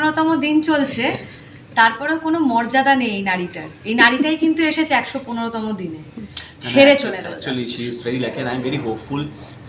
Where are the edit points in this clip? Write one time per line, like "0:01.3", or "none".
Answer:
none